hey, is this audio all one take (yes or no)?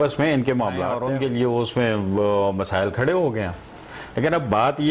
no